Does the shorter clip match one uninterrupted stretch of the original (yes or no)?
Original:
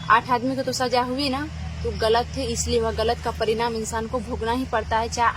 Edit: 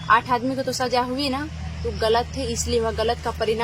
yes